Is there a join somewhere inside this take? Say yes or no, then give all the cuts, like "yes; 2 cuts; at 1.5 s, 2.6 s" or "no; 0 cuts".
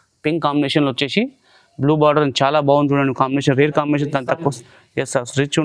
no; 0 cuts